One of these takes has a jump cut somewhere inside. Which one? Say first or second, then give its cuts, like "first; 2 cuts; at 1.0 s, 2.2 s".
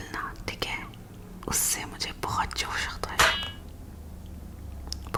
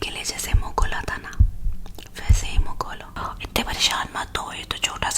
second; 1 cut; at 3.2 s